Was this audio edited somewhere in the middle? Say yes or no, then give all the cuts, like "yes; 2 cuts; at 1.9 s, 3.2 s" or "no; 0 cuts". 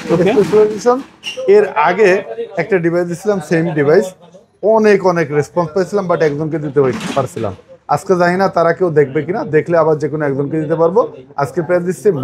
no; 0 cuts